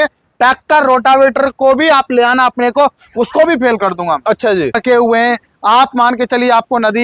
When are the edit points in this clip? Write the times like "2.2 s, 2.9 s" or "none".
4.8 s